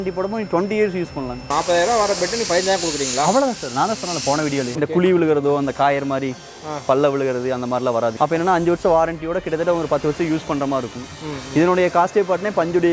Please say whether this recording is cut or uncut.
cut